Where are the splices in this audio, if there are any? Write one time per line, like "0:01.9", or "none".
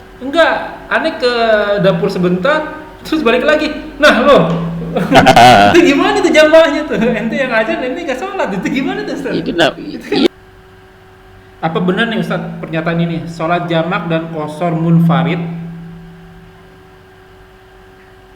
0:10.3